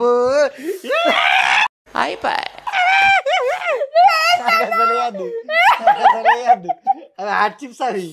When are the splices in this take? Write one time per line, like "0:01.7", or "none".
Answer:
none